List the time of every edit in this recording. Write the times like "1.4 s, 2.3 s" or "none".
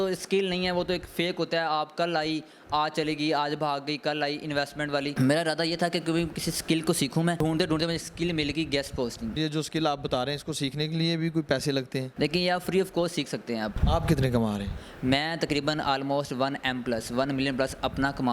5.1 s, 7.4 s, 9.3 s, 13.8 s